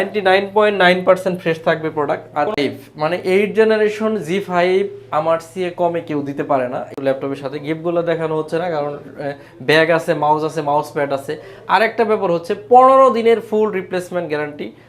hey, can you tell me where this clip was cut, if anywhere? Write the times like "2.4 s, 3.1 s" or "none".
2.6 s, 6.9 s

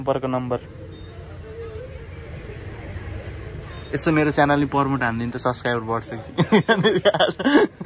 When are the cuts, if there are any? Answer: none

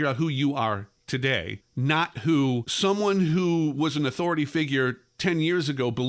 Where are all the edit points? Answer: 1.6 s, 2.7 s

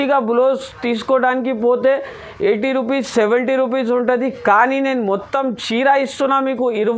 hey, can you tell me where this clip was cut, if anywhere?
none

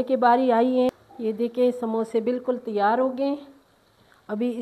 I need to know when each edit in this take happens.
1.1 s

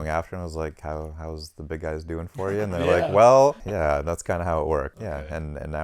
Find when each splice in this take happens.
3.6 s, 4.9 s

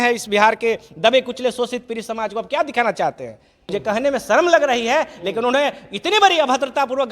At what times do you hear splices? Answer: 3.5 s

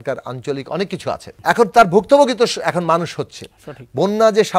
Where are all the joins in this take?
1.3 s

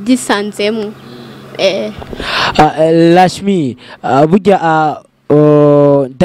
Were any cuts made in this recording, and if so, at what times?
none

